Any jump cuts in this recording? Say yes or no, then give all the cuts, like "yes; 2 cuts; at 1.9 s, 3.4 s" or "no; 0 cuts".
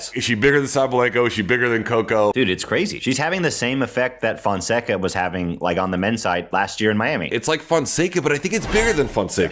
no; 0 cuts